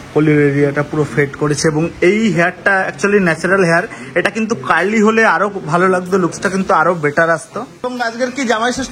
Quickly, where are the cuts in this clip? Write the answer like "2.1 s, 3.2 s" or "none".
7.9 s